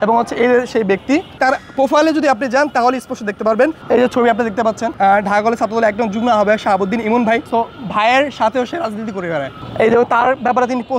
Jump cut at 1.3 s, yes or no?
yes